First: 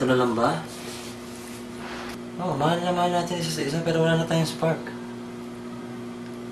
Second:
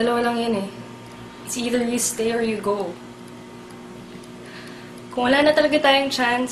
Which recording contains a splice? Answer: first; 1 cut; at 2.2 s

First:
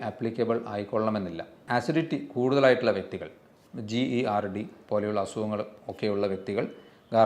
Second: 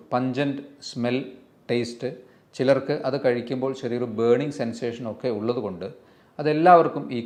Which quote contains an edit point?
first; 1 cut; at 1.7 s

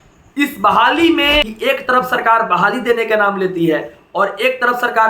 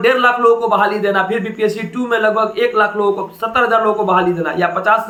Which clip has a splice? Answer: first; 1 cut; at 1.5 s

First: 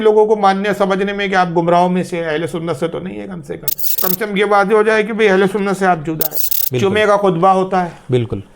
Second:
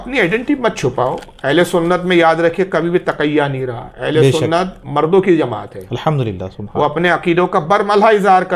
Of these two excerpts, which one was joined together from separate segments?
first; 2 cuts; at 4.0 s, 6.3 s

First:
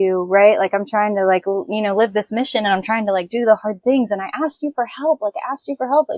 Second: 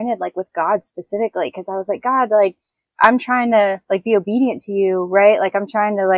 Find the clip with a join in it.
second; 1 cut; at 2.8 s

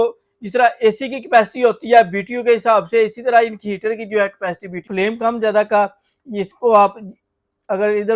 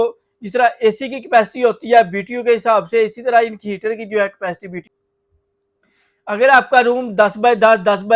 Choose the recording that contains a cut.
first; 1 cut; at 4.9 s

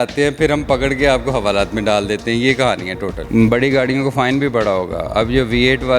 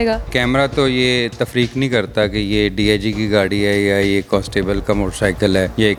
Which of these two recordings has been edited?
first; 1 cut; at 3.2 s

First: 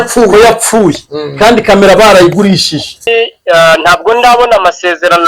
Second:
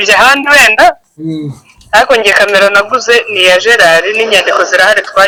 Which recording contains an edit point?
first; 1 cut; at 3.1 s

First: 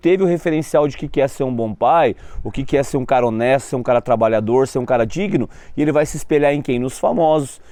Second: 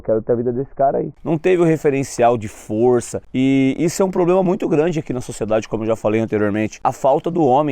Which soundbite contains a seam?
second; 3 cuts; at 1.1 s, 3.2 s, 6.8 s

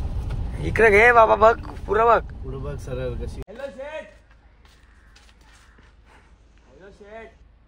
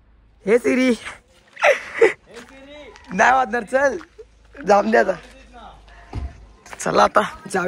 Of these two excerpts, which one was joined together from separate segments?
first; 1 cut; at 3.4 s

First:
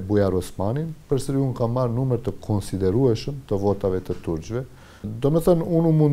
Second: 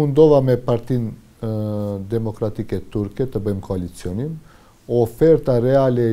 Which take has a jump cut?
first; 1 cut; at 5.1 s

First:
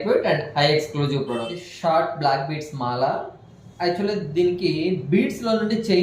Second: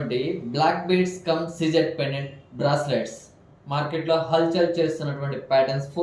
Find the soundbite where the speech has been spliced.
first; 1 cut; at 1.6 s

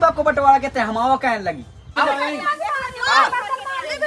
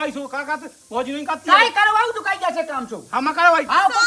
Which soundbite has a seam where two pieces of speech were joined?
first; 1 cut; at 1.9 s

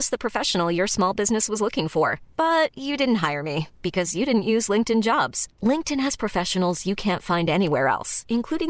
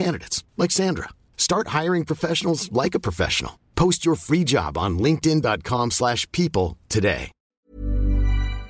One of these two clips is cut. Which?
second; 1 cut; at 7.5 s

